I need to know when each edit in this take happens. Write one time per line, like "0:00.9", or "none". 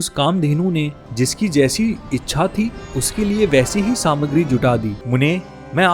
0:05.0